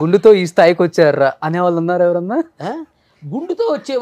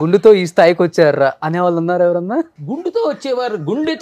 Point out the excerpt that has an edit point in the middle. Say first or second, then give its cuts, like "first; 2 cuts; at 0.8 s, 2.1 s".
second; 1 cut; at 2.6 s